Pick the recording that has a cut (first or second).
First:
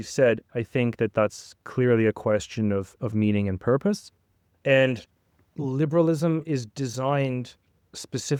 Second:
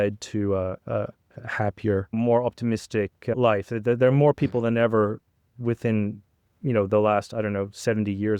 second